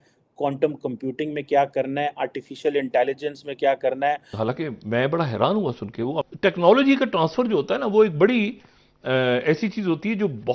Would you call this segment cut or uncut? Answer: cut